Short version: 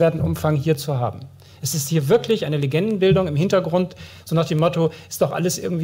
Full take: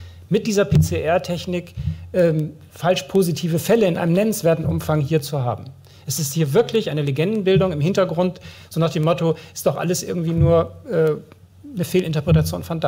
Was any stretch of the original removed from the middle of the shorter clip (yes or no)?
no